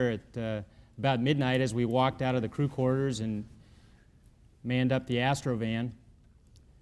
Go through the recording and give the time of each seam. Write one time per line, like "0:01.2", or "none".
0:04.0

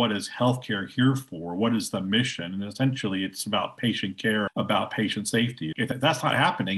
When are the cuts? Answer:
0:05.8

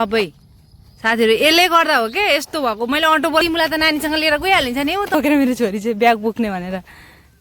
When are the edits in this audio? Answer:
0:03.4
0:05.1

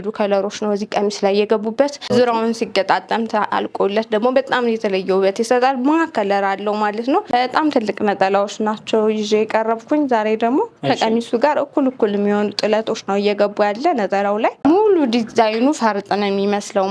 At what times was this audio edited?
0:02.1
0:07.3
0:14.6

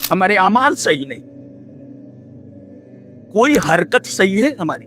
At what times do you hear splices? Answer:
0:01.8
0:03.3

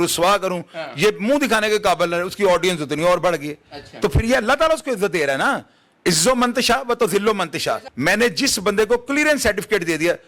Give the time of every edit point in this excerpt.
0:07.9

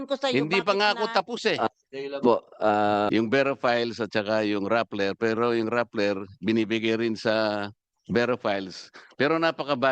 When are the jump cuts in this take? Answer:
0:03.1

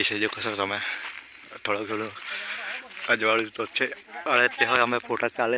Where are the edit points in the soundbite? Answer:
none

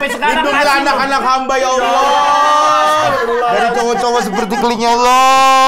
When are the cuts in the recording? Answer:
none

